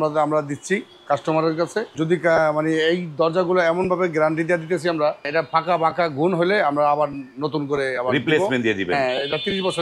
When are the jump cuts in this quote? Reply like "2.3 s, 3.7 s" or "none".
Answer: 1.9 s, 5.3 s